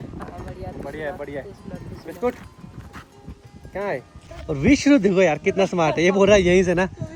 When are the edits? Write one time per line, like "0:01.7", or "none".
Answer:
none

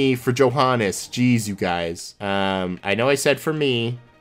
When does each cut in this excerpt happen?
0:02.1

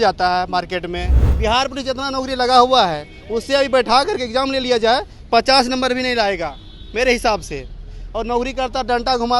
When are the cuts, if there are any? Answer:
0:01.2

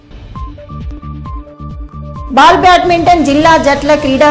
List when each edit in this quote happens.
0:01.7

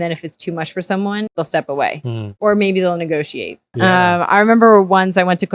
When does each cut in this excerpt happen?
0:01.3
0:02.2
0:03.6

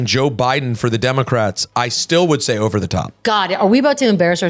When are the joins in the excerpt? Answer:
0:03.2

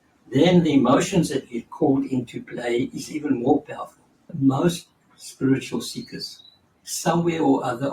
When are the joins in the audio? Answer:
0:04.3

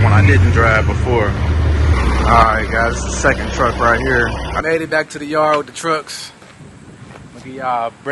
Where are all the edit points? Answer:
0:01.9
0:04.6

